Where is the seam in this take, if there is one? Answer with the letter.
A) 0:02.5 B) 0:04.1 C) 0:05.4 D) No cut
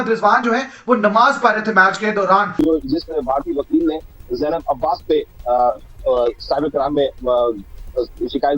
A